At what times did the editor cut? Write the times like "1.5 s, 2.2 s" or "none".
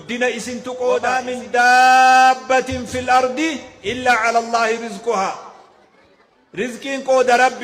1.1 s